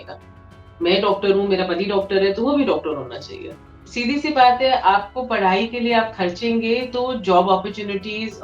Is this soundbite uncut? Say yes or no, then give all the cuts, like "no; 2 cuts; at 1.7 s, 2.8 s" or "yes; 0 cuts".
no; 1 cut; at 3.8 s